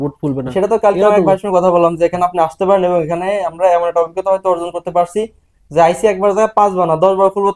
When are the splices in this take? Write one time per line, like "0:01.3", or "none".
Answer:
none